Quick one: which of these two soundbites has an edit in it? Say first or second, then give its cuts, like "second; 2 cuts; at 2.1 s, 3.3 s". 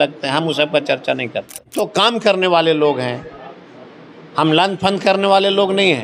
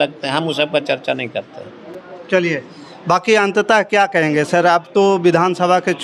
first; 1 cut; at 1.7 s